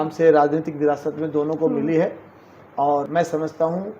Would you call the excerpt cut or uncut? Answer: cut